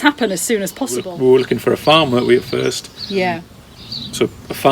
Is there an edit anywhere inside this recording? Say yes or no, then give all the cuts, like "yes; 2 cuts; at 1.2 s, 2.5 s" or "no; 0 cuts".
yes; 2 cuts; at 1.1 s, 3.4 s